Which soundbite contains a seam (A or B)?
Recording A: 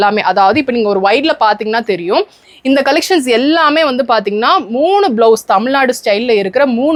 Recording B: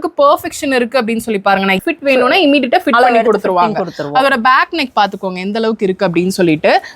B